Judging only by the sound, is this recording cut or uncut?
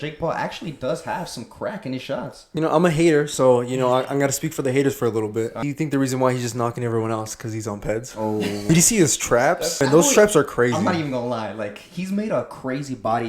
cut